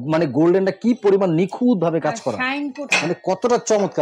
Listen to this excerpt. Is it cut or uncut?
cut